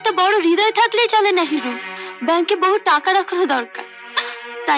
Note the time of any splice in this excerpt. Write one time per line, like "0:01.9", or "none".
none